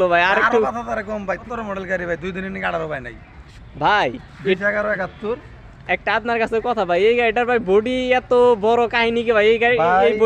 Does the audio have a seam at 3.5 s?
yes; 2 cuts; at 1.4 s, 3.5 s

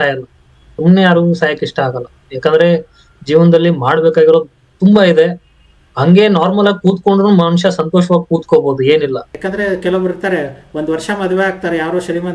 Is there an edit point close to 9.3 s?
yes; 1 cut; at 9.3 s

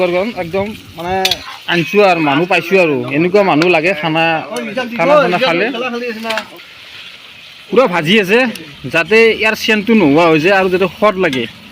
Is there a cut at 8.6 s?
no; 1 cut; at 6.6 s

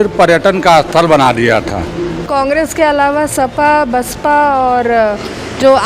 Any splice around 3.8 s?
no; 1 cut; at 2.2 s

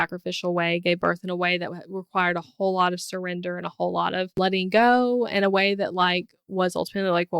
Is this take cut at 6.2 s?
no; 1 cut; at 4.4 s

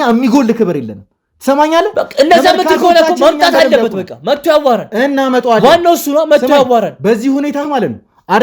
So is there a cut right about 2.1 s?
no; 0 cuts

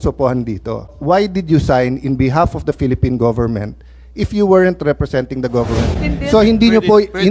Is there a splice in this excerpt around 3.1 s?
no; 2 cuts; at 0.9 s, 6.0 s

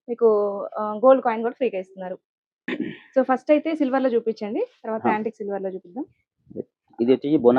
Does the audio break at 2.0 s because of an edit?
no; 0 cuts

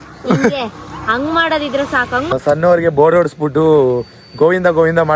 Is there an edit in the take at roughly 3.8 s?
no; 1 cut; at 2.3 s

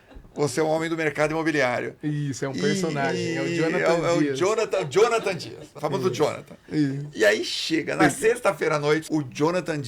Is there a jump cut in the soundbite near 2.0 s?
no; 2 cuts; at 5.7 s, 9.0 s

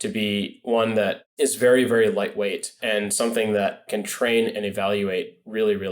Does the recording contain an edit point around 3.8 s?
yes; 2 cuts; at 2.7 s, 3.8 s

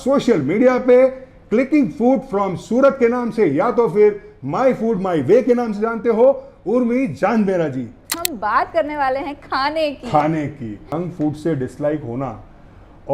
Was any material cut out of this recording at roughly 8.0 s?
yes; 2 cuts; at 8.0 s, 11.0 s

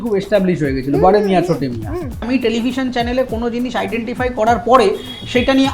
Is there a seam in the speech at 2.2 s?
yes; 1 cut; at 2.2 s

